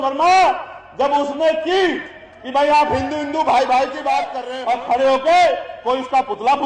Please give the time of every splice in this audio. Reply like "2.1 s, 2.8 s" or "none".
4.4 s